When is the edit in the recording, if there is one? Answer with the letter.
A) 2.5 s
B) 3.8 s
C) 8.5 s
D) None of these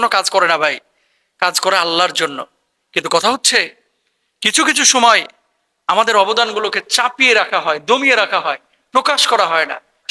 D